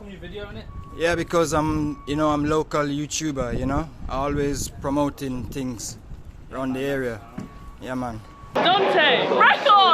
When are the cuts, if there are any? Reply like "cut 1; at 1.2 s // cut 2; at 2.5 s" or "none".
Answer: cut 1; at 8.4 s